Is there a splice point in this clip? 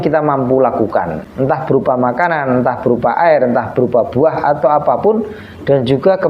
yes; 1 cut; at 1.2 s

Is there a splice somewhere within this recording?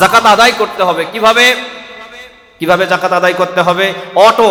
no; 0 cuts

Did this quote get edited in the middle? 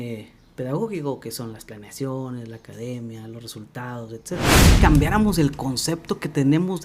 yes; 1 cut; at 4.7 s

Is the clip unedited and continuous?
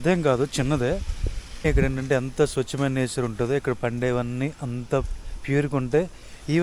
no; 1 cut; at 1.5 s

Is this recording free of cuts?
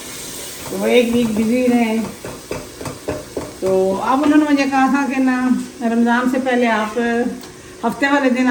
yes; 0 cuts

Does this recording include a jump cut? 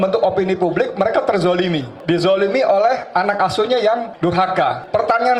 yes; 2 cuts; at 1.9 s, 4.3 s

